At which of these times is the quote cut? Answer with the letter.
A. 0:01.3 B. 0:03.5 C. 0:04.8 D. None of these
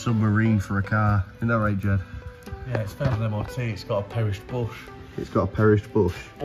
A